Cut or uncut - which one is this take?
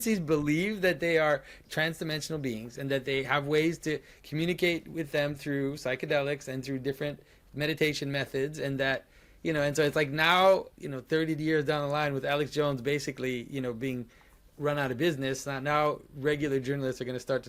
cut